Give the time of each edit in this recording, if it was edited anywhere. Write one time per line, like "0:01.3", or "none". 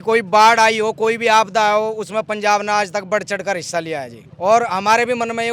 0:04.2